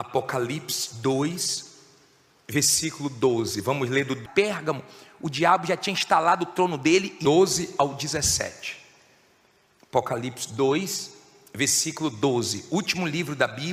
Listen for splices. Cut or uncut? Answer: uncut